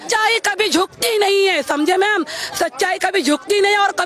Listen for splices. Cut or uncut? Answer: uncut